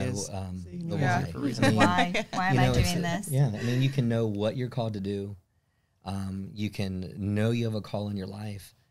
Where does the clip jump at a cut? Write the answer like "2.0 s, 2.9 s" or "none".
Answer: none